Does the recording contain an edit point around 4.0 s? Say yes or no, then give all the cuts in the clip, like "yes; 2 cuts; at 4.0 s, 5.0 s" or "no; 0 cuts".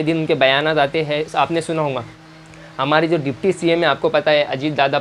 no; 1 cut; at 2.1 s